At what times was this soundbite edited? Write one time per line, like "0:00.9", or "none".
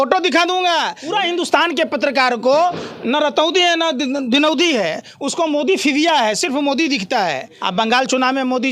0:01.0
0:07.5